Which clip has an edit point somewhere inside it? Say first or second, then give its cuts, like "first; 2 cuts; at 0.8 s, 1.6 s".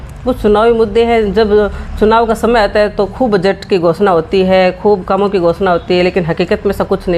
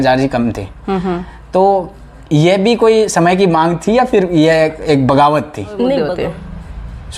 second; 1 cut; at 6.1 s